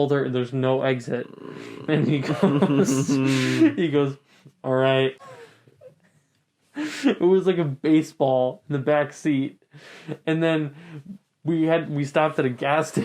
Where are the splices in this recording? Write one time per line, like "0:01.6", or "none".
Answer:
0:05.3

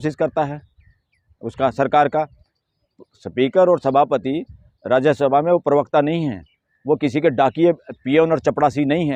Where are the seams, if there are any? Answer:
none

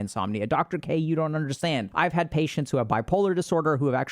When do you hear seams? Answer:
0:01.9

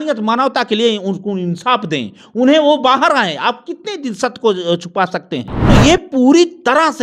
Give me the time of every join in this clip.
0:05.5

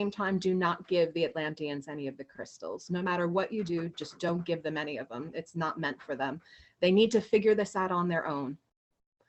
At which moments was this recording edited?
none

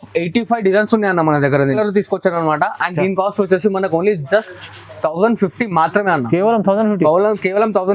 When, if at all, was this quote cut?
0:01.8

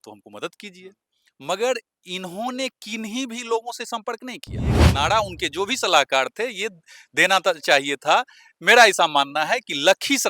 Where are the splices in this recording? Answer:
0:04.9

